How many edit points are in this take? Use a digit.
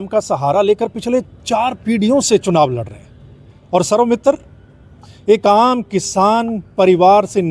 0